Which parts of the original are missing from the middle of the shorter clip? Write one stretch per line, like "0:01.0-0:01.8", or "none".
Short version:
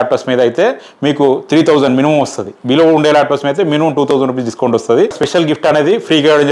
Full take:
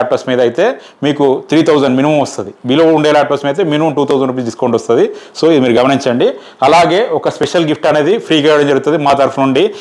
0:05.2-0:07.4